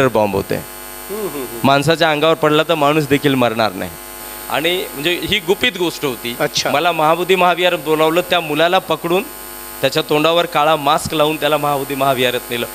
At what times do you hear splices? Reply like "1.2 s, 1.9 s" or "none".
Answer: 4.2 s